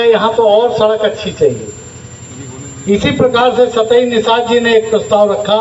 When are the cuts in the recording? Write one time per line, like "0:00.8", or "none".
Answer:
none

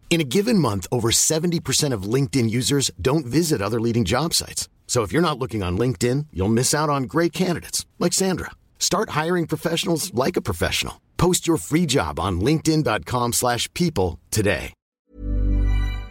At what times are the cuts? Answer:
0:14.8

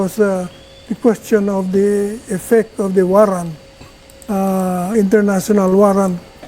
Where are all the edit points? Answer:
none

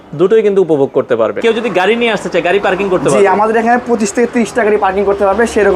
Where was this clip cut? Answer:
0:01.4

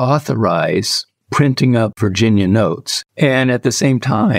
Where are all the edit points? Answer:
0:02.0
0:02.9

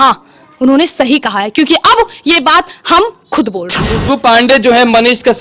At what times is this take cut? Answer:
0:03.9

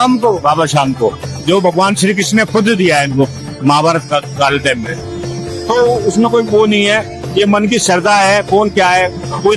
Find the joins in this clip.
none

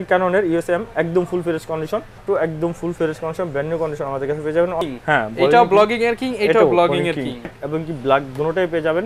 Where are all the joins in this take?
0:02.2
0:04.8
0:07.5

